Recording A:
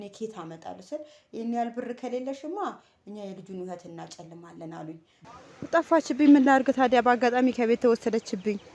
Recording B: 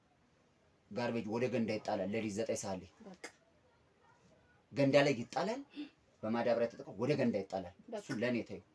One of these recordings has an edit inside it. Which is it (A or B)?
A